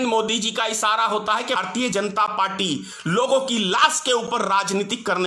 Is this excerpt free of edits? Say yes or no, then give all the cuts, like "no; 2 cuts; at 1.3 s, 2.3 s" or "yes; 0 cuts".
no; 1 cut; at 1.6 s